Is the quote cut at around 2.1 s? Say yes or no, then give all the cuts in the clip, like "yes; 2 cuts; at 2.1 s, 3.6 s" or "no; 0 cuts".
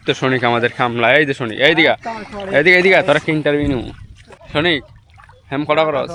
no; 0 cuts